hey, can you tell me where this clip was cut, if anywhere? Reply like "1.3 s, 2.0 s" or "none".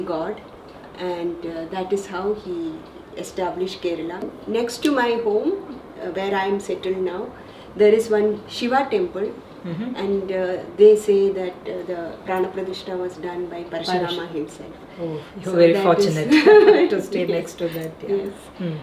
4.3 s